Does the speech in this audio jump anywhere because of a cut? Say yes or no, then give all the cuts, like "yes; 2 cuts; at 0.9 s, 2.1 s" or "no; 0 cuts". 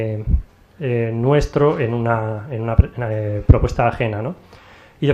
yes; 1 cut; at 1.8 s